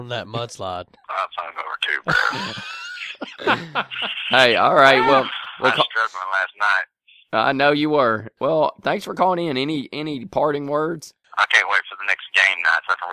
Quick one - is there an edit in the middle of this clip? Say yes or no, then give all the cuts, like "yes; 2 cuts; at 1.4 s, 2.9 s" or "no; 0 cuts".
yes; 2 cuts; at 1.0 s, 8.3 s